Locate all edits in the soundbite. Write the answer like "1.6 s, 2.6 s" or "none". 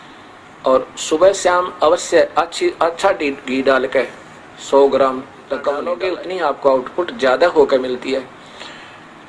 5.9 s